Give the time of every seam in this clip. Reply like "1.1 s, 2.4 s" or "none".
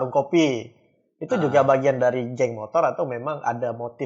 none